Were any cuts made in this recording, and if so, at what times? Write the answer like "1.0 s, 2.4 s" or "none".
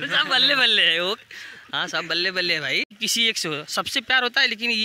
2.9 s